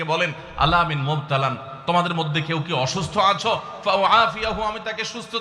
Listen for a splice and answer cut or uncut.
uncut